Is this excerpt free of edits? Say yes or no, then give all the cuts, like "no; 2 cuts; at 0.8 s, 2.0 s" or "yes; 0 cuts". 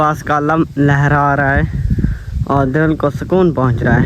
yes; 0 cuts